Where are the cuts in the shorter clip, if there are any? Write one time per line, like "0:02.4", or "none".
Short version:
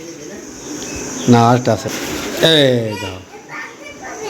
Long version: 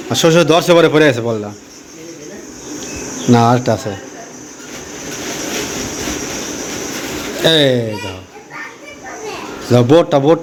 0:01.9